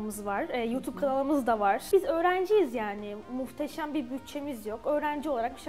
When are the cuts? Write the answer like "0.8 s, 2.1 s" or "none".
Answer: 1.9 s